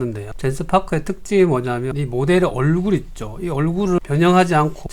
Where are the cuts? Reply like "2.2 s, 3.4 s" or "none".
none